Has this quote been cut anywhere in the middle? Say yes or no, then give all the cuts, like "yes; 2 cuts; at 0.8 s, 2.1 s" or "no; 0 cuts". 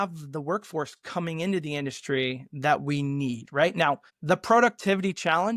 no; 0 cuts